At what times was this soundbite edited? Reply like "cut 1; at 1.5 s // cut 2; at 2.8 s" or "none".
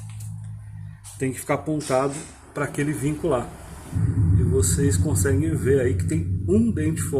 cut 1; at 4.0 s

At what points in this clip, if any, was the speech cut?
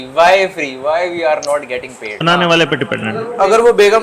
cut 1; at 2.2 s

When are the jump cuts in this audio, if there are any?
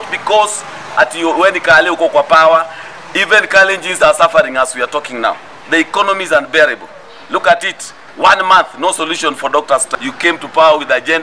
cut 1; at 10.0 s

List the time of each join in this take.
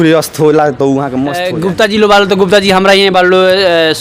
cut 1; at 1.4 s

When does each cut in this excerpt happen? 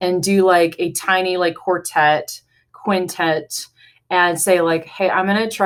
none

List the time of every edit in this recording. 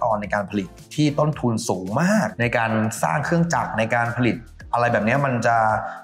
none

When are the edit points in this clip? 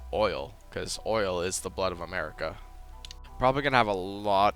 cut 1; at 3.2 s

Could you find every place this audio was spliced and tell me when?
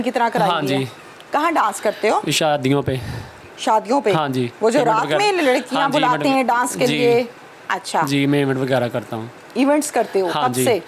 none

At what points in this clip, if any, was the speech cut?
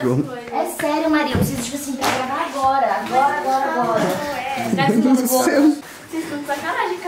cut 1; at 5.9 s

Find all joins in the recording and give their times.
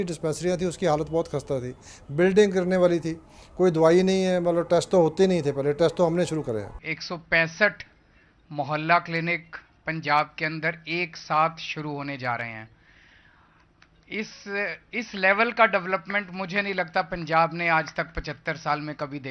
cut 1; at 6.8 s

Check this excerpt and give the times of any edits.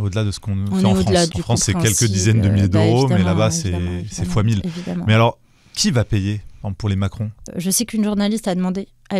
cut 1; at 1.3 s // cut 2; at 7.4 s

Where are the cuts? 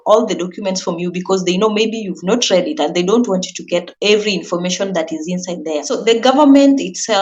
cut 1; at 5.9 s

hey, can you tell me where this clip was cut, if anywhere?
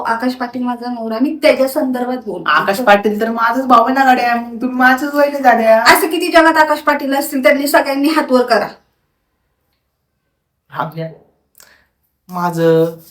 none

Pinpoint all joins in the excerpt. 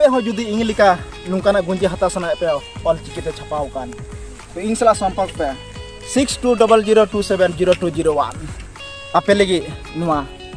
none

